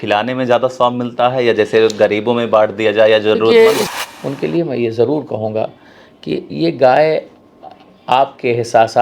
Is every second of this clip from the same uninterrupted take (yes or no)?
no